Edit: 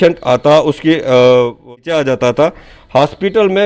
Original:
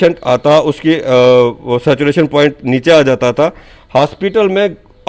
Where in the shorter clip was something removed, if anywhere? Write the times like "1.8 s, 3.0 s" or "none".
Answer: 1.7 s